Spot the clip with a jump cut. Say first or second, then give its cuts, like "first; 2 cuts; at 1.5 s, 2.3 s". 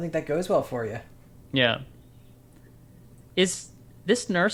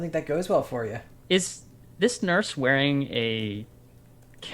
second; 1 cut; at 1.1 s